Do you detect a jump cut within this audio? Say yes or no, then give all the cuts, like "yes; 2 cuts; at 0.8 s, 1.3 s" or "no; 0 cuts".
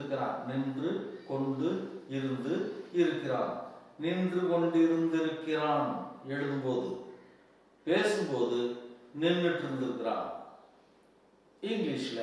no; 0 cuts